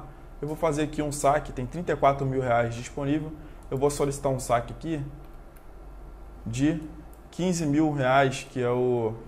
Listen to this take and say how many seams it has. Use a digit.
0